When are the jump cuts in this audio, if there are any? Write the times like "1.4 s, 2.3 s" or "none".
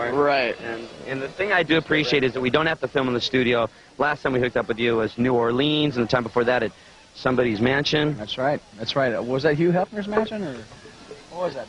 4.2 s